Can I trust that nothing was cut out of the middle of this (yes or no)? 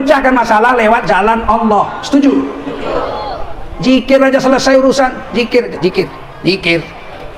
yes